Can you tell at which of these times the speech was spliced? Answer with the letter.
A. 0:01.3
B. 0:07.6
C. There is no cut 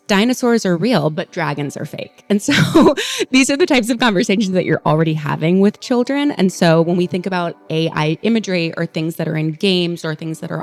C